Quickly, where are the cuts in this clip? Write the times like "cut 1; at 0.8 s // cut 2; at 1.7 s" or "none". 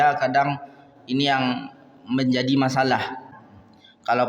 cut 1; at 3.4 s